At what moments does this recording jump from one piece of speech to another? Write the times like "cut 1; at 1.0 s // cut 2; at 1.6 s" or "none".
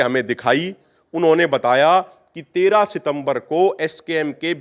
none